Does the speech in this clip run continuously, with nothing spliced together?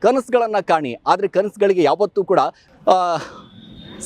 no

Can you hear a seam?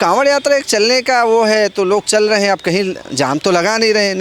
no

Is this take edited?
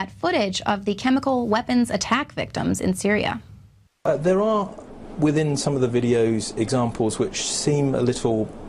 no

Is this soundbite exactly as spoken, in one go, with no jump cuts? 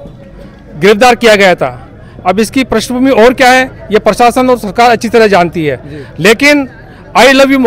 yes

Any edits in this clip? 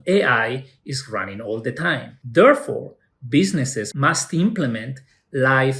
yes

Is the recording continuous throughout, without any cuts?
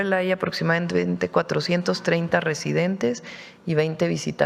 yes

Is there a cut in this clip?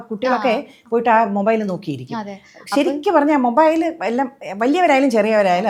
no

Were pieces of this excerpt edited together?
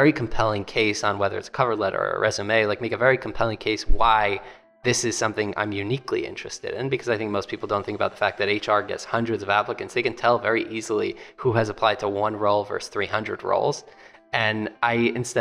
no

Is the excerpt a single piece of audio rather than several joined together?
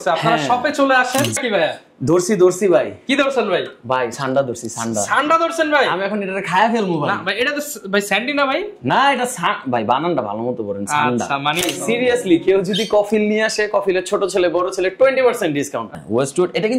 no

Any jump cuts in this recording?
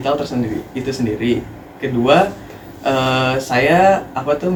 no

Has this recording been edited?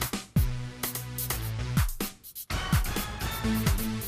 yes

